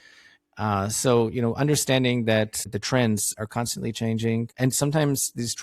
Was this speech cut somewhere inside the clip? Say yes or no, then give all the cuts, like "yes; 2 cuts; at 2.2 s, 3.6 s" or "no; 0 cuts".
yes; 2 cuts; at 2.7 s, 4.5 s